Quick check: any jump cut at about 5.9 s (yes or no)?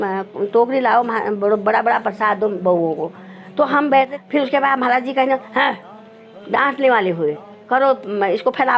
no